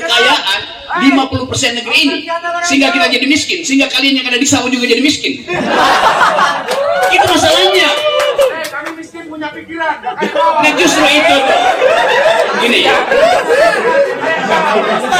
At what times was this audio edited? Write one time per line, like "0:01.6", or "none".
none